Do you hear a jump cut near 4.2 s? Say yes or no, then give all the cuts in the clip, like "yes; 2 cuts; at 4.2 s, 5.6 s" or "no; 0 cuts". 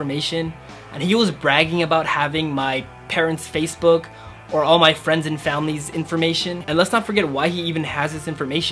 no; 1 cut; at 6.6 s